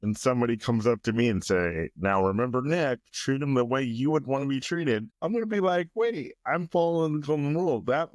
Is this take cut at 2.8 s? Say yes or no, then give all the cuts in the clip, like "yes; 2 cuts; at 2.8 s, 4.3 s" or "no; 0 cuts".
no; 1 cut; at 5.1 s